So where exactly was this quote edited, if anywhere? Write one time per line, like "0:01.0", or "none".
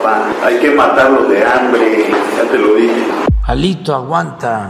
0:03.2